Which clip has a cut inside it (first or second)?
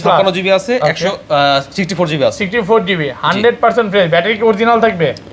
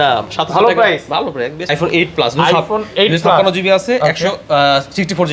second